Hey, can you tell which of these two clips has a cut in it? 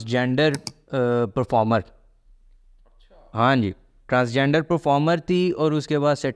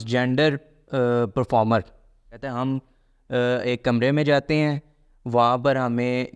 second; 1 cut; at 2.5 s

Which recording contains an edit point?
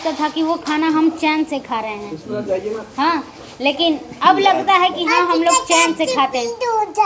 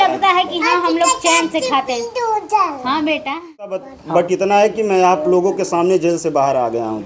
second; 1 cut; at 3.9 s

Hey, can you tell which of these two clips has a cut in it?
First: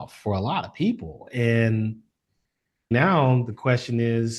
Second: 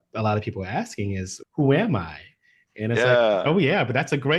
first; 1 cut; at 2.9 s

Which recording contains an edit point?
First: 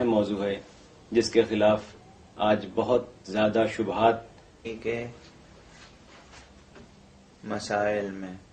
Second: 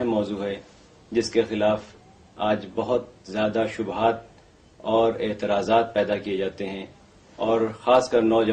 second; 1 cut; at 4.7 s

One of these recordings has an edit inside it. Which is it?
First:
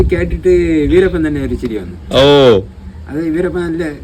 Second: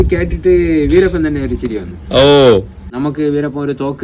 second; 1 cut; at 2.8 s

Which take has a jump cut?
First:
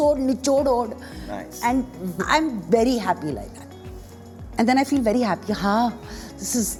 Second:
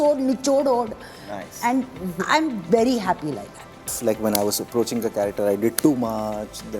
second; 1 cut; at 3.9 s

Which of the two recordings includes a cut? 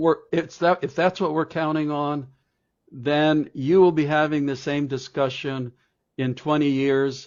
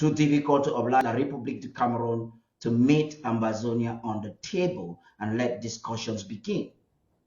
second; 1 cut; at 1.0 s

